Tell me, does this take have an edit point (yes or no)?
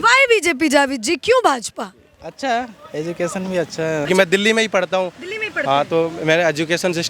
yes